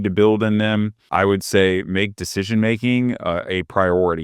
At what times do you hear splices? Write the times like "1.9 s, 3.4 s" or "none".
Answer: 1.0 s